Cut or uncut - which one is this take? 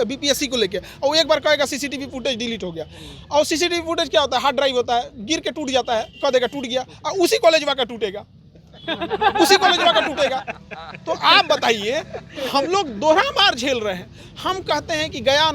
uncut